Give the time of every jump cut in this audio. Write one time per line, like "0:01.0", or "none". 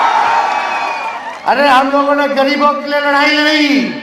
none